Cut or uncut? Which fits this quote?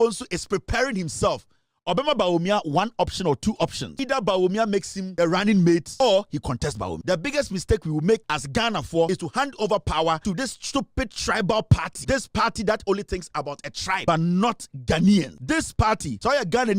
cut